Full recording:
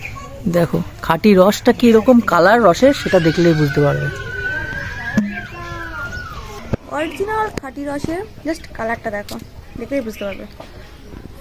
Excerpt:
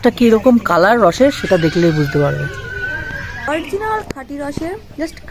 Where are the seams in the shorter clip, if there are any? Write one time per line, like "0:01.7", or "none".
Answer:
0:03.4